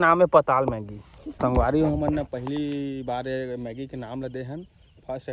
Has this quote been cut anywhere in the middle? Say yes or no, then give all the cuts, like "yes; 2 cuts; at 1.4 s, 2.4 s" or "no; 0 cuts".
yes; 1 cut; at 1.4 s